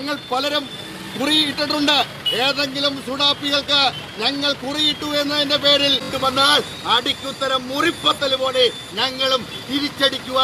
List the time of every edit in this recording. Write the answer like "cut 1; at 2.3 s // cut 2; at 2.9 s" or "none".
cut 1; at 6.1 s